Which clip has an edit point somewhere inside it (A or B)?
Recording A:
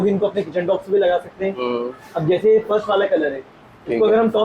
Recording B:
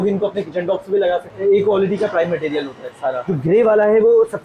B